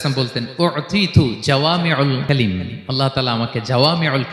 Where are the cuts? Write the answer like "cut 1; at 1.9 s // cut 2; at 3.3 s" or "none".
cut 1; at 2.2 s